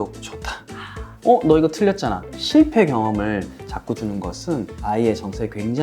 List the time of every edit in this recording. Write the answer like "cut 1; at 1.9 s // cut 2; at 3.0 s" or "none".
cut 1; at 1.1 s // cut 2; at 2.3 s // cut 3; at 4.0 s